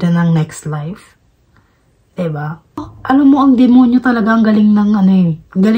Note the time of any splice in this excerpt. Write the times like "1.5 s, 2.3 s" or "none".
2.9 s